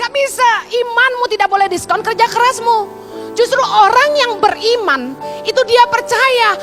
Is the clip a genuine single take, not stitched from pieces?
yes; 0 cuts

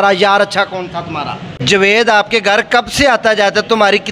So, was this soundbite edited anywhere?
yes; 1 cut; at 1.6 s

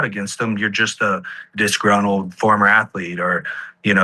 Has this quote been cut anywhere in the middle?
no; 0 cuts

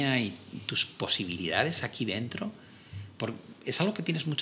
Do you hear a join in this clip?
no; 0 cuts

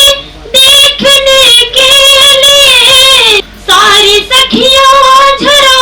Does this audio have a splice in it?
yes; 1 cut; at 3.4 s

